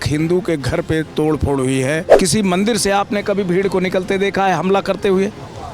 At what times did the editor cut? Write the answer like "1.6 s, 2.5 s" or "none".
2.1 s